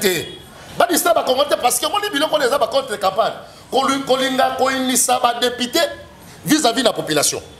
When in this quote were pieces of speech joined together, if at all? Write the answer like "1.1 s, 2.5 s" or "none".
none